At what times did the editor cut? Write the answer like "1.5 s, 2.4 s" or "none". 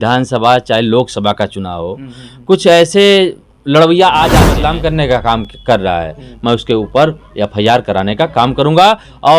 4.5 s